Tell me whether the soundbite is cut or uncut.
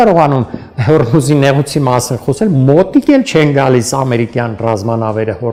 uncut